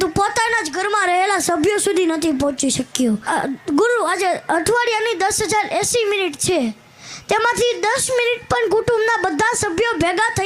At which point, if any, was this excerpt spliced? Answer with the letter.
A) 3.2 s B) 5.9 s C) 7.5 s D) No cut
A